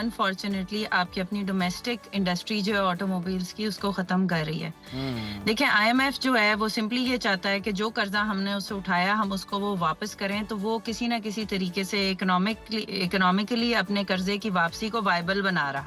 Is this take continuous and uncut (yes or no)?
yes